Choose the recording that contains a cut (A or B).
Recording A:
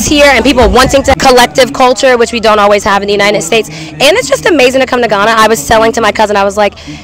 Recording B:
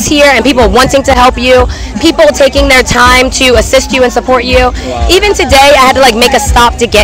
A